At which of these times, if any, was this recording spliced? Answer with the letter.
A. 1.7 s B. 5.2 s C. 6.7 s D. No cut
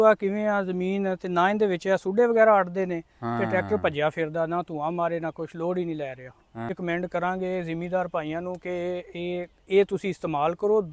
C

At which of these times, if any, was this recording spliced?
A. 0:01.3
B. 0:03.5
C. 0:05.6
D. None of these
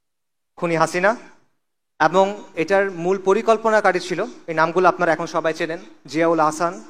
D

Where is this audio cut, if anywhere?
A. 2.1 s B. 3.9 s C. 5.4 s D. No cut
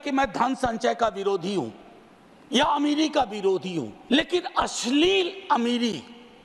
B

